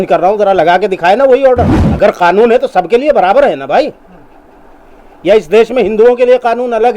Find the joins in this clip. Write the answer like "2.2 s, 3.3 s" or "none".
1.8 s